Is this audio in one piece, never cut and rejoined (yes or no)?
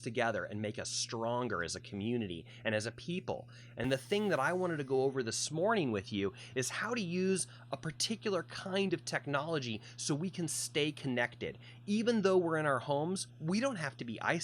no